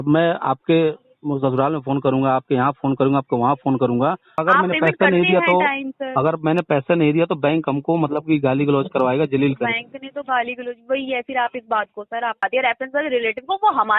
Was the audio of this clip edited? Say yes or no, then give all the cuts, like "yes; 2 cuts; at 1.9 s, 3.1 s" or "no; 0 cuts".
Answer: yes; 2 cuts; at 4.4 s, 12.4 s